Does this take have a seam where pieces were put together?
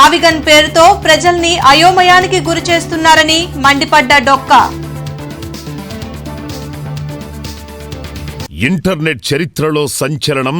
yes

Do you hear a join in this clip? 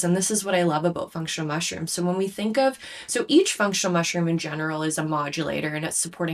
no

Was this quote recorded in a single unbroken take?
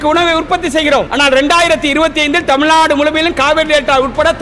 no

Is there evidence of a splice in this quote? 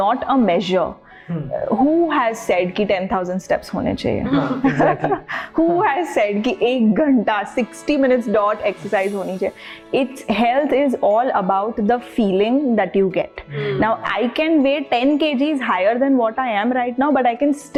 no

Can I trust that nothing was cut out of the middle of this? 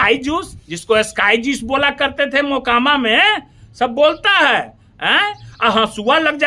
yes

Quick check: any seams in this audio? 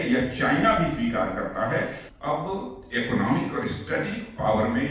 yes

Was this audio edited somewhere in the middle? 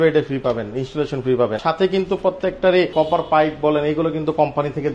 yes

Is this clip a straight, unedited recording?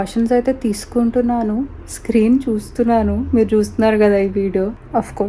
yes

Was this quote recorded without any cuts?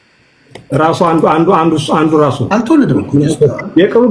yes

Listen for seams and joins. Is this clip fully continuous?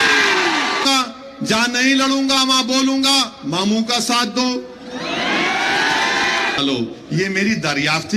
no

